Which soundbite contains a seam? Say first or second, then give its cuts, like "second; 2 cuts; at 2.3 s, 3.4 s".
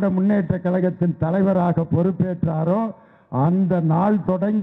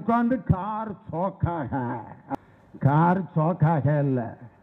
second; 1 cut; at 2.3 s